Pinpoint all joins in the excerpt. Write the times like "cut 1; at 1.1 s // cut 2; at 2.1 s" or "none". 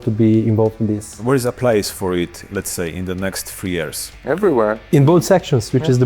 cut 1; at 1.1 s // cut 2; at 2.5 s // cut 3; at 4.1 s